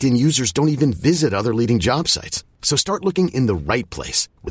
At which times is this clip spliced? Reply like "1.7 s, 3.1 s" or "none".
none